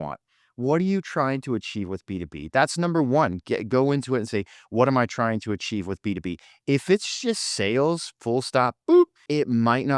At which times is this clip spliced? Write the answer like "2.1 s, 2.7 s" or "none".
none